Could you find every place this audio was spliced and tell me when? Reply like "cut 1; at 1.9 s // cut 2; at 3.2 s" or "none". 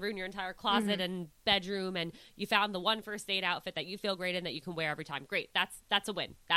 none

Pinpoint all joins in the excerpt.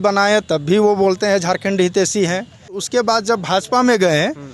cut 1; at 2.8 s

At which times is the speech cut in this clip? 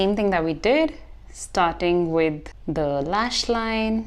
cut 1; at 2.5 s

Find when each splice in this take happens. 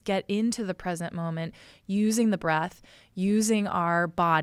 none

